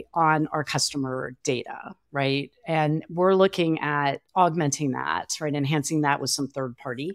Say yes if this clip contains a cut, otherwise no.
yes